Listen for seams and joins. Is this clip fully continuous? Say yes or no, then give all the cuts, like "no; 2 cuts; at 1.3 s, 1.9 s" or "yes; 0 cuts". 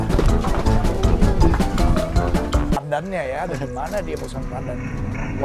no; 1 cut; at 2.8 s